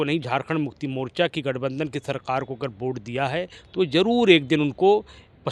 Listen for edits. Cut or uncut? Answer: uncut